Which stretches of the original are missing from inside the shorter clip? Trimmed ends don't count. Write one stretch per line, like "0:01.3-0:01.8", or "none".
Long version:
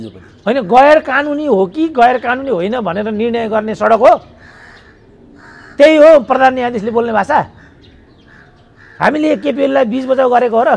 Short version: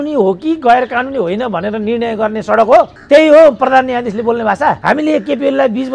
0:04.3-0:05.7
0:07.5-0:09.0